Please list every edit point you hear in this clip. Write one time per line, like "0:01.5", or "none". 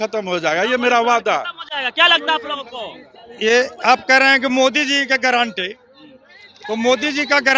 none